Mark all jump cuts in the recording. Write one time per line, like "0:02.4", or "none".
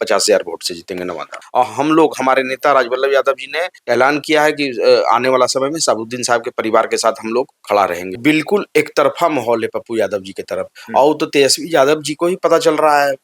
0:01.4
0:03.8
0:08.1